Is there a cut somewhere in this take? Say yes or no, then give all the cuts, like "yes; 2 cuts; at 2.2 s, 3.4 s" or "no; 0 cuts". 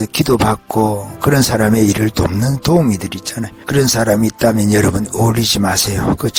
no; 0 cuts